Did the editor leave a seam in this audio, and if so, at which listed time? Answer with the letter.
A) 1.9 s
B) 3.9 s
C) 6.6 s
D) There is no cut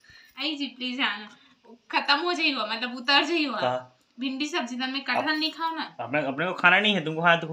D